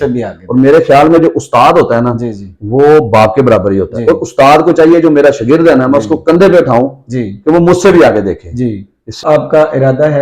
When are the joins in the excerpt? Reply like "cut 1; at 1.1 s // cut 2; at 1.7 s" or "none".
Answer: cut 1; at 9.2 s